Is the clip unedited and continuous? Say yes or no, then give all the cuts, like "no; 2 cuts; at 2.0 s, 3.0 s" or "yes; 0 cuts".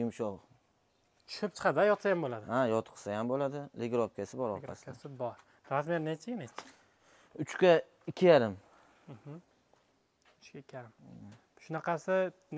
yes; 0 cuts